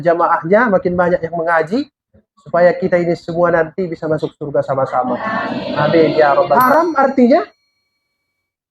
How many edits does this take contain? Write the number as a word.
one